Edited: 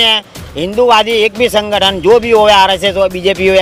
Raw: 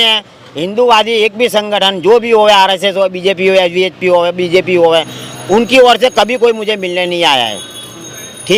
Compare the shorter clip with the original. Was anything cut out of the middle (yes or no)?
no